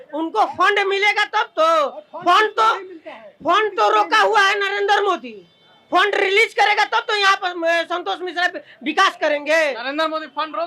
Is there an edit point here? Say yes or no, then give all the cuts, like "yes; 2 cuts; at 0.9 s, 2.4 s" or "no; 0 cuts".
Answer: no; 0 cuts